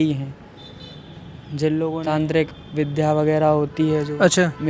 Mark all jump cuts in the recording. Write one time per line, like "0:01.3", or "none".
0:01.5